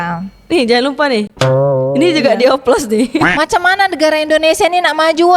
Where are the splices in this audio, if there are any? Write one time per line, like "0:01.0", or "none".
0:03.1